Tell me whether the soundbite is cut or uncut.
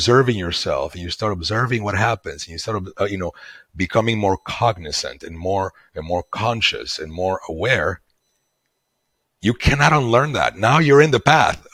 uncut